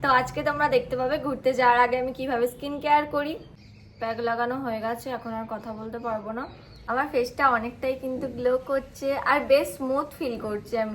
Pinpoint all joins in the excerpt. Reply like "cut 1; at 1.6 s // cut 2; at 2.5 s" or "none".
cut 1; at 3.5 s // cut 2; at 6.9 s